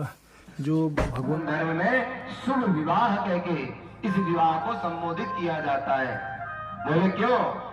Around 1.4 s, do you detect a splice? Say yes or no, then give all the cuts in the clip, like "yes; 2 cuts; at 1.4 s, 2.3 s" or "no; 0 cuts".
yes; 1 cut; at 1.4 s